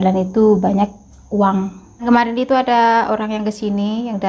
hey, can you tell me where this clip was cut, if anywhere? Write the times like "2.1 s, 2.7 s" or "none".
2.0 s